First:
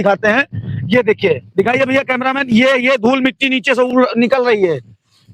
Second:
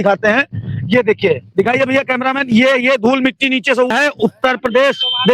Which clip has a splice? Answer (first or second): second